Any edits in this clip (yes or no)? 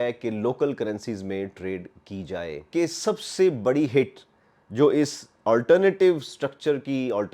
yes